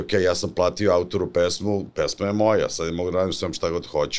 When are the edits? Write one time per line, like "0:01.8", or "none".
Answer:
none